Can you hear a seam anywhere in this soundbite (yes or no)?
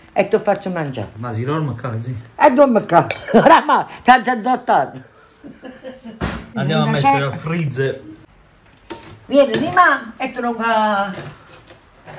yes